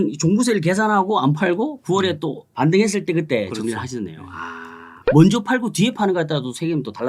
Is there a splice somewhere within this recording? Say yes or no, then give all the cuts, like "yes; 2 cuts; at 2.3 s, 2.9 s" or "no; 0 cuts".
yes; 1 cut; at 5.0 s